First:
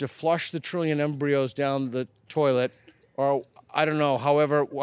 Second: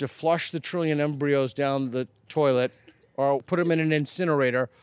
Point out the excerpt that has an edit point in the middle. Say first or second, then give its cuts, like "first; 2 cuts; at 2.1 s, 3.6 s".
second; 1 cut; at 3.5 s